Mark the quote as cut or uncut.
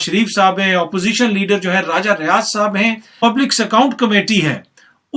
cut